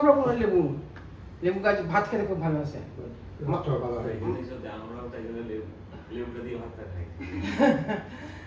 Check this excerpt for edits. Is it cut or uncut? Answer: uncut